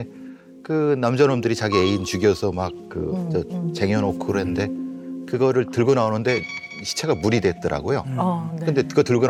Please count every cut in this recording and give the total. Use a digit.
0